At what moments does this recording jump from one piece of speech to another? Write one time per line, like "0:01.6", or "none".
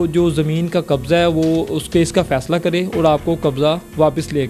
none